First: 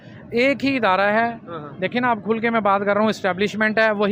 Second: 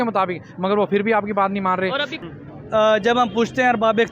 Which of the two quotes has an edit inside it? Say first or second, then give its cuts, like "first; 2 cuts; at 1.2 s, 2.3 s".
second; 1 cut; at 2.1 s